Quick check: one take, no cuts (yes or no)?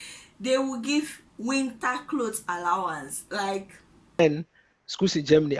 no